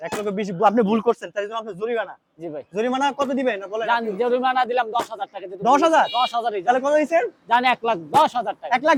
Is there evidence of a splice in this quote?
no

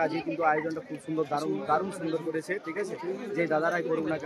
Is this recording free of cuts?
yes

